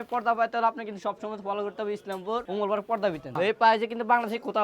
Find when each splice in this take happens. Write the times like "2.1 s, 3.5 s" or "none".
2.5 s, 3.3 s